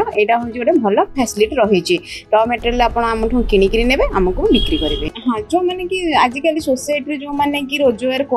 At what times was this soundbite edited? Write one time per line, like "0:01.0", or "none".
0:05.0